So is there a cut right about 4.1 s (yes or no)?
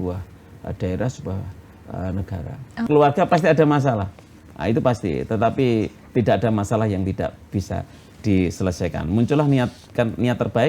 no